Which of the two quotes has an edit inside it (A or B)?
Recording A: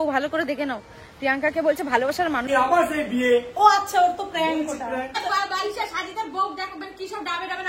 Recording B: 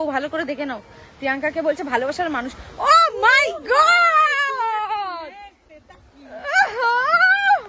A